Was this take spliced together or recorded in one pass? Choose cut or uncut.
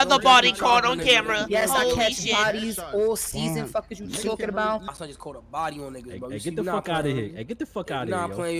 cut